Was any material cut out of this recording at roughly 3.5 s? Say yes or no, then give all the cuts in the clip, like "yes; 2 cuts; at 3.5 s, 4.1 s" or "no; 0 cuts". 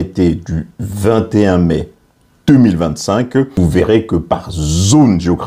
yes; 1 cut; at 3.5 s